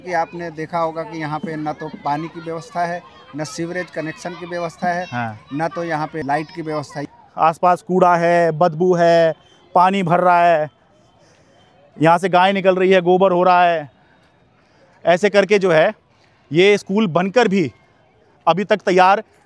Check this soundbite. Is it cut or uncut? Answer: cut